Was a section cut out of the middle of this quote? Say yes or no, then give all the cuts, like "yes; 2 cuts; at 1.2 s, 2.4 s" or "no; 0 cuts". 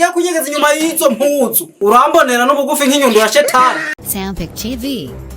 yes; 1 cut; at 4.0 s